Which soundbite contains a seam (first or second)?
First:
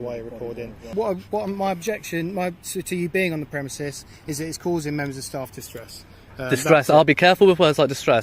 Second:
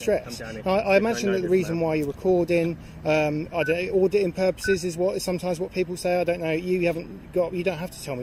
first